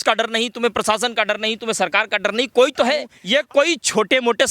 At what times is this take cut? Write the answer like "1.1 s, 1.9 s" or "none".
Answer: 3.1 s